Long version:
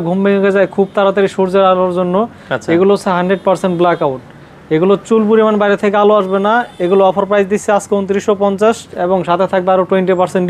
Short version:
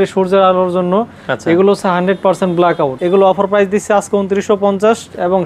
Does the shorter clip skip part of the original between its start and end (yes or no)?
yes